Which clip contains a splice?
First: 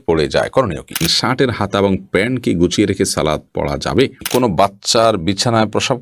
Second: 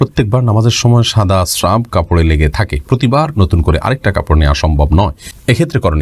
first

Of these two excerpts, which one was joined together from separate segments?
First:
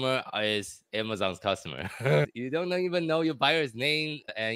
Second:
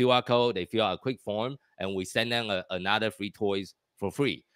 first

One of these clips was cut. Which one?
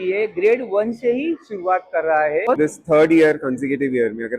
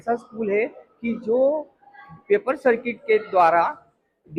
first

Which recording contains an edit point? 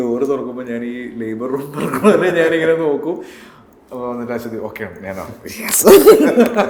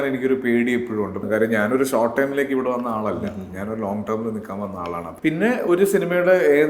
second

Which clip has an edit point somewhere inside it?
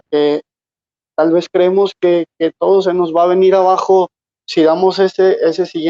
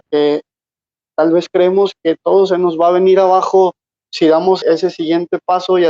second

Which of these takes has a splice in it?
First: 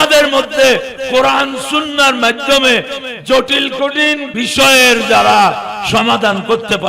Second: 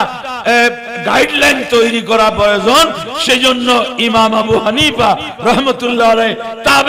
first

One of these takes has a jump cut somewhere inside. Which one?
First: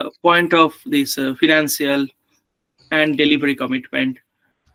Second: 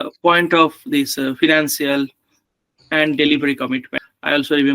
second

